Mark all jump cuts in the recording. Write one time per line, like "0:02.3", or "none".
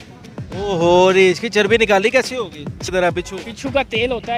0:02.9